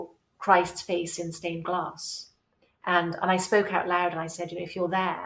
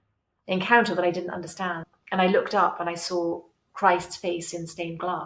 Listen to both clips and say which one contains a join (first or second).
second